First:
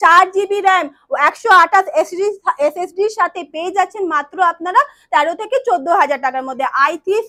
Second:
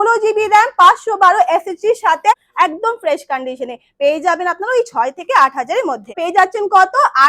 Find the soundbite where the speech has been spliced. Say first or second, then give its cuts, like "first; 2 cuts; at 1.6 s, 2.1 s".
second; 2 cuts; at 2.5 s, 6.2 s